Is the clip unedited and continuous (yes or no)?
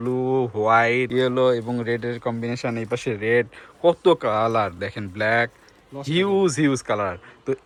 yes